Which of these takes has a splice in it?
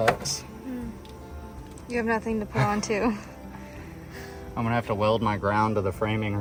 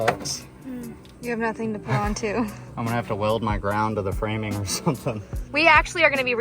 second; 3 cuts; at 1.0 s, 2.6 s, 5.4 s

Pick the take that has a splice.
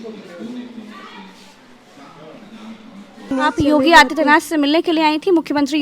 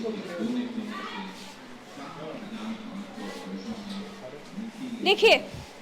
first; 1 cut; at 3.3 s

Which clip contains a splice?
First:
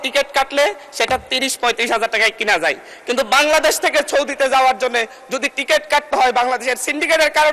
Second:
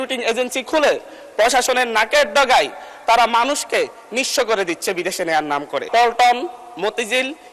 second; 1 cut; at 5.9 s

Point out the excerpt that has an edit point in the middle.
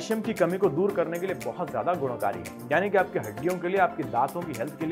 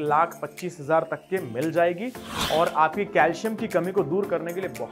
second; 1 cut; at 2.3 s

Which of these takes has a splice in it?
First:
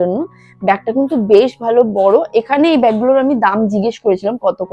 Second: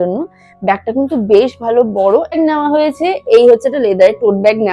second; 1 cut; at 2.3 s

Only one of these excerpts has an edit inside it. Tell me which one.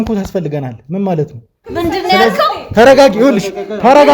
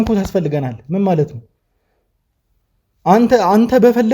first; 1 cut; at 1.6 s

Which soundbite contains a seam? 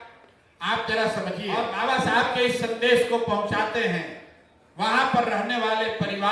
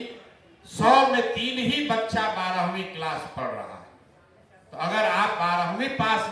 first; 1 cut; at 1.7 s

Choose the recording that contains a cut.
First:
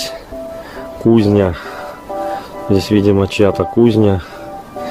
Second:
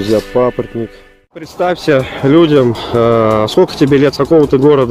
second; 1 cut; at 1.5 s

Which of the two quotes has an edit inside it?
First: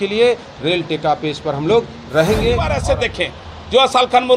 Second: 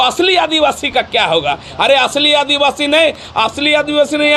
first; 1 cut; at 2.7 s

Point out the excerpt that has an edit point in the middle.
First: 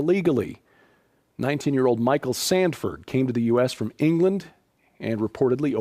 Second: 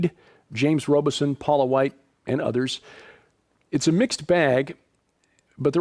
first; 1 cut; at 2.9 s

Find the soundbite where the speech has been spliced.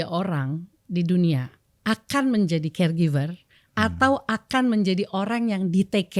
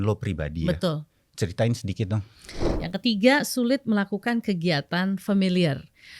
second; 1 cut; at 2.8 s

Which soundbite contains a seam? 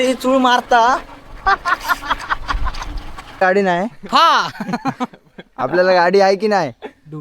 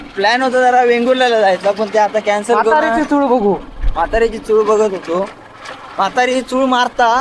first; 1 cut; at 3.4 s

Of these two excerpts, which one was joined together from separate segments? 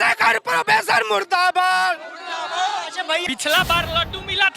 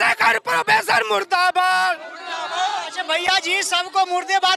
first; 1 cut; at 3.2 s

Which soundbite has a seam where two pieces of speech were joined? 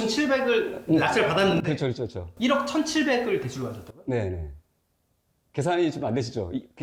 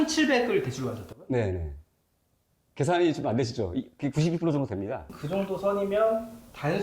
second; 1 cut; at 5.1 s

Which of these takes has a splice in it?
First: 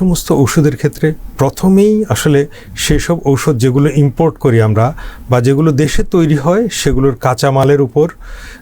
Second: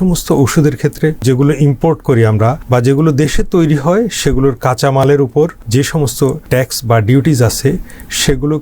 second; 3 cuts; at 1.2 s, 2.6 s, 6.1 s

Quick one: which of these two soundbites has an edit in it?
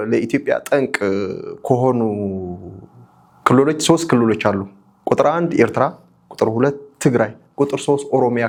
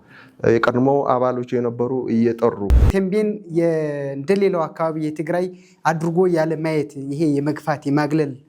second; 1 cut; at 2.7 s

